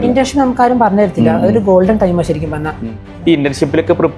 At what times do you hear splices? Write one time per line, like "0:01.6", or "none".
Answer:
0:03.0